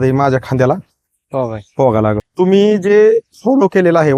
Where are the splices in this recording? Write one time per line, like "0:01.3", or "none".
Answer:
0:02.2